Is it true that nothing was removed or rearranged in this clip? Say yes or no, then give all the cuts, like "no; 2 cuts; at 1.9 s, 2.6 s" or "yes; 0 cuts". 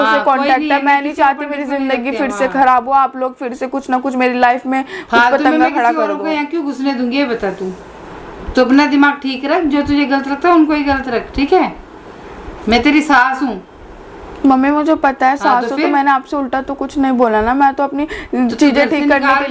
yes; 0 cuts